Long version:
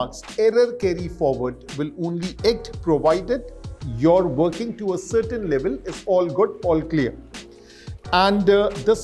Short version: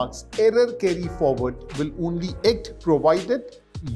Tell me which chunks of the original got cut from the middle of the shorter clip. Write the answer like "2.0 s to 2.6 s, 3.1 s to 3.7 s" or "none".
none